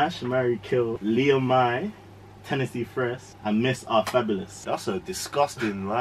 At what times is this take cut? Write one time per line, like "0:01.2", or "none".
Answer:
0:01.0
0:04.5